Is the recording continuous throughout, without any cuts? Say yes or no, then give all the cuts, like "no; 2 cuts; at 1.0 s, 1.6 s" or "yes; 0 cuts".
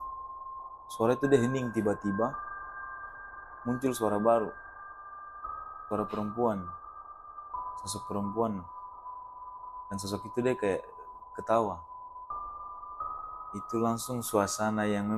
yes; 0 cuts